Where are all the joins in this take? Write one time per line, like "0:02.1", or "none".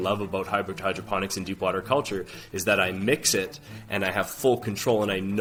none